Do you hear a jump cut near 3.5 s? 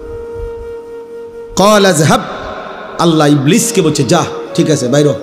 no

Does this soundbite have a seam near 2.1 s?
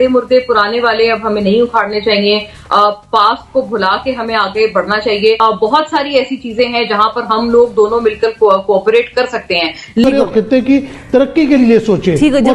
no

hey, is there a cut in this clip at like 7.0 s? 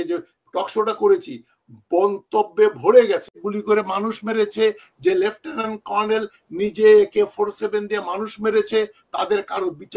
no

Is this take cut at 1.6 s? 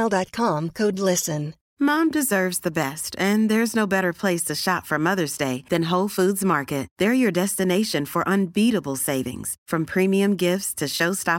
yes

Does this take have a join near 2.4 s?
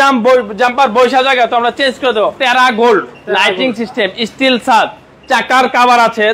yes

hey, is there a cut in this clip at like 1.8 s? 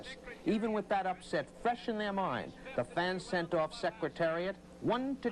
yes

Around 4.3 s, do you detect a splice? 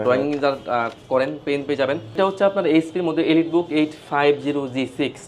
no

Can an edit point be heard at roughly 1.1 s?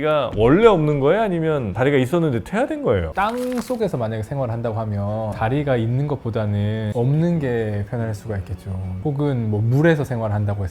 no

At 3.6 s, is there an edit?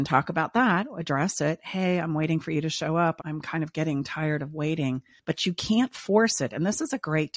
no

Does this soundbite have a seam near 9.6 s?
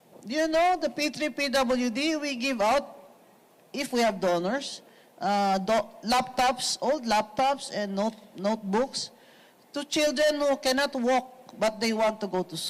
no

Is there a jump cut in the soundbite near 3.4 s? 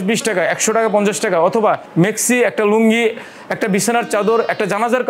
no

